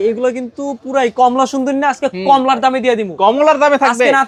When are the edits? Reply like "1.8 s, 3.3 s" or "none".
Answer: none